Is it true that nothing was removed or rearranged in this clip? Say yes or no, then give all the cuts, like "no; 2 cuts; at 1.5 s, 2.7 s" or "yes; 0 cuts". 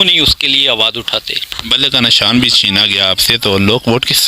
no; 1 cut; at 1.5 s